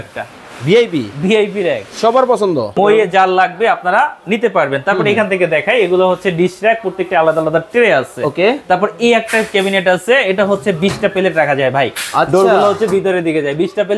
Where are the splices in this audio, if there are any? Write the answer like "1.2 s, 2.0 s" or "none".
2.8 s